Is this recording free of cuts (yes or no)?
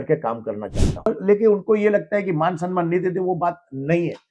no